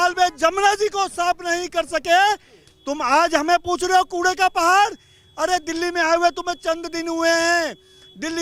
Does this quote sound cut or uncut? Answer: uncut